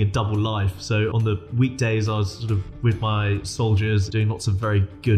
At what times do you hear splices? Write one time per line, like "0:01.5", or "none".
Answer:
0:01.2
0:04.1